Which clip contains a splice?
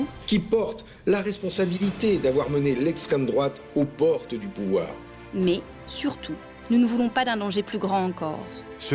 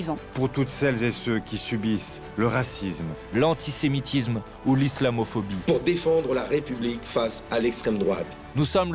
second; 2 cuts; at 2.2 s, 3.2 s

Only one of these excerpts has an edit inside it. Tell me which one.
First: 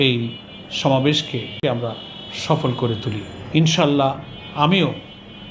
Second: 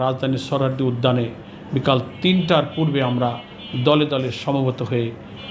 first; 2 cuts; at 1.6 s, 3.3 s

